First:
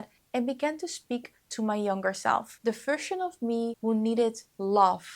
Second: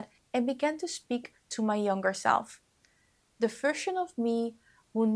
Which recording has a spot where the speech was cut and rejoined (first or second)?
first